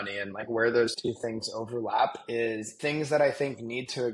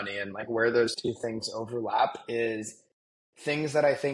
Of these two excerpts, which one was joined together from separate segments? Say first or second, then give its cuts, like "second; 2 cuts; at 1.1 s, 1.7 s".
first; 1 cut; at 2.7 s